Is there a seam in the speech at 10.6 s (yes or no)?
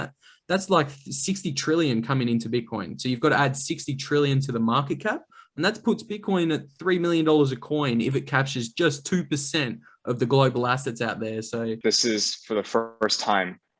no